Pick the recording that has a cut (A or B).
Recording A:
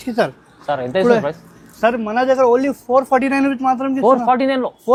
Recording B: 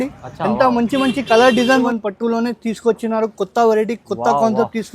B